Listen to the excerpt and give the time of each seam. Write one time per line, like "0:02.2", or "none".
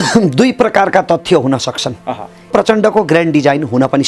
0:02.5